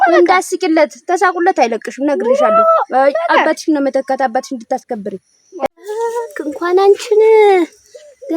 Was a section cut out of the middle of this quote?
yes; 1 cut; at 5.7 s

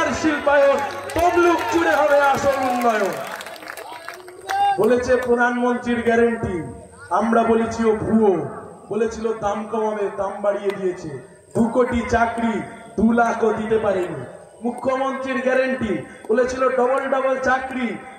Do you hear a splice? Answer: no; 0 cuts

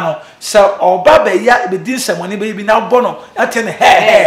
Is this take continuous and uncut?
yes; 0 cuts

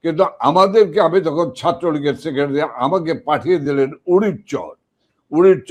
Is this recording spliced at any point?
no; 0 cuts

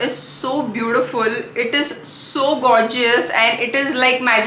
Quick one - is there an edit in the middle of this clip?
no; 0 cuts

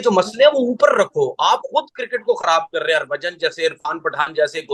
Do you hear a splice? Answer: no; 0 cuts

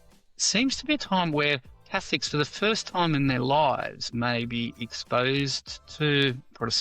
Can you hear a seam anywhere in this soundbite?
no; 0 cuts

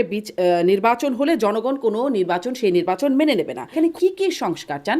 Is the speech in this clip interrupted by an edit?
yes; 1 cut; at 3.6 s

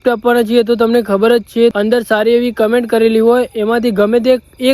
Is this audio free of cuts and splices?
no; 1 cut; at 1.7 s

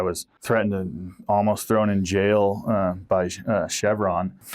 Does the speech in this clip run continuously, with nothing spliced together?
yes; 0 cuts

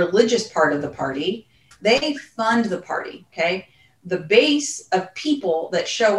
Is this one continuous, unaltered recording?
no; 1 cut; at 1.7 s

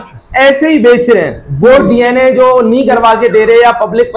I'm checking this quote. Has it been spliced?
no; 0 cuts

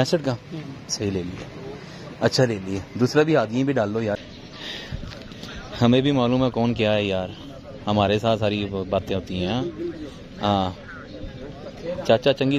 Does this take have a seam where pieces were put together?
yes; 1 cut; at 4.2 s

